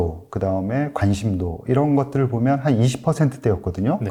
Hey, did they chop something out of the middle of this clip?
no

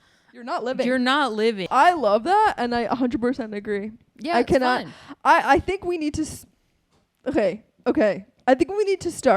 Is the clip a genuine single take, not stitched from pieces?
no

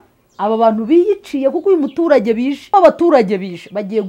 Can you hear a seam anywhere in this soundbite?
yes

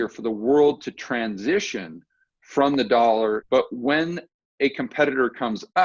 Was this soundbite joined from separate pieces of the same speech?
yes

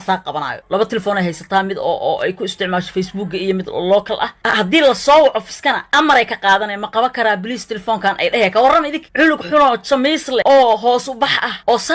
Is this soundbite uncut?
no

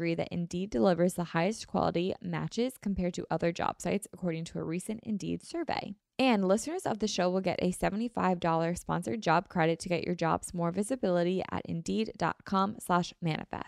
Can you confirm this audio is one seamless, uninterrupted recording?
no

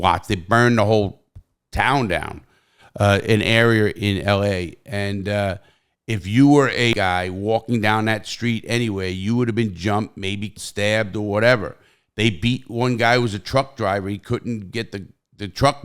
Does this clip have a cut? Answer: yes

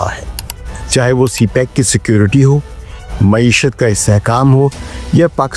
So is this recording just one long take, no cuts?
yes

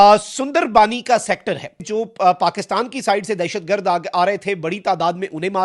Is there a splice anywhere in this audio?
yes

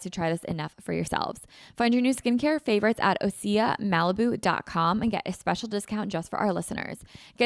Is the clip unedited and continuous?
yes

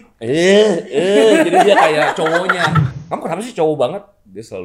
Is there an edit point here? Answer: yes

